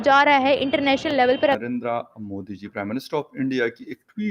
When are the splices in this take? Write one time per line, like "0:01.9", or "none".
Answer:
0:01.6

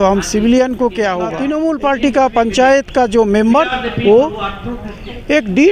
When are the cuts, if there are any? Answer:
0:01.3

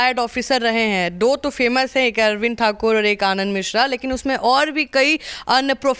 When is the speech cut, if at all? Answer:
none

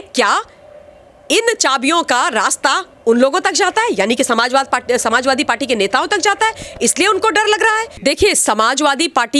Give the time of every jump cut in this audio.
0:07.9

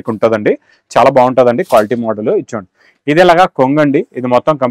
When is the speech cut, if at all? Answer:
none

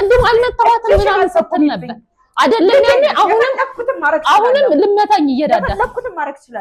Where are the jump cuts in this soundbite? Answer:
none

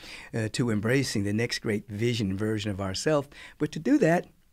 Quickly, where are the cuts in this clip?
none

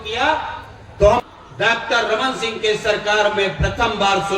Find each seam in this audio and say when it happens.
0:01.3

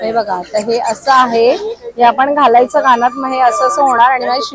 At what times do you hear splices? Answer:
none

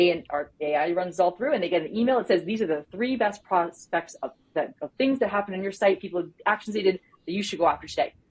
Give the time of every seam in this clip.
none

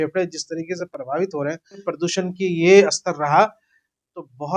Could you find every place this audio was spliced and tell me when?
0:01.9

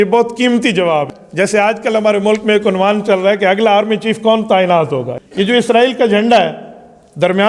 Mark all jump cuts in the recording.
0:01.1
0:05.1

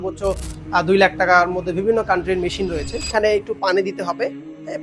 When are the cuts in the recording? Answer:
0:02.9

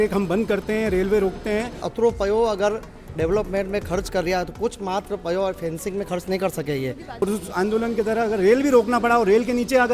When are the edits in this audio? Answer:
0:01.9
0:07.2

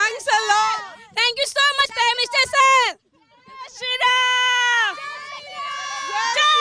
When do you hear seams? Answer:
none

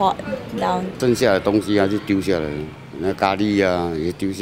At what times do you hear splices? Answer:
0:01.0

